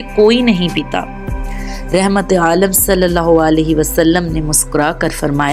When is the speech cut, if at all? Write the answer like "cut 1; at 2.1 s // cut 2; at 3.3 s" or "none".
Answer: none